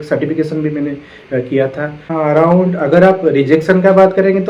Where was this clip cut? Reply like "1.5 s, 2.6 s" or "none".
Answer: 2.0 s